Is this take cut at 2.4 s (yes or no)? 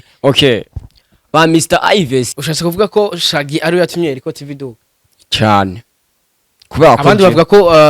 yes